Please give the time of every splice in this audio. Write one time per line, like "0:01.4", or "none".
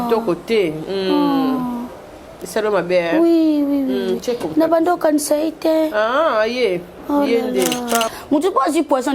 0:08.1